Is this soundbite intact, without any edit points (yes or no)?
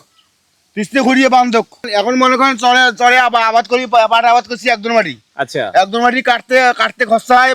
yes